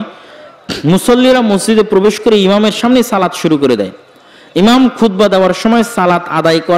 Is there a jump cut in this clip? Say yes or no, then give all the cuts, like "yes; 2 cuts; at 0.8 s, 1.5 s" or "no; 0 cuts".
no; 0 cuts